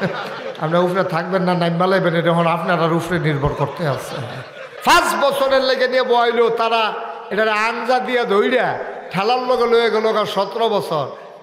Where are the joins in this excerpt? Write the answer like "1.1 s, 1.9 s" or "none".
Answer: 4.7 s